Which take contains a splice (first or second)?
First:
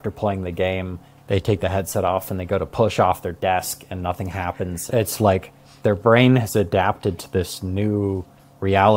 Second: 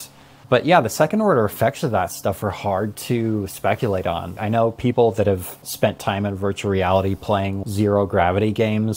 second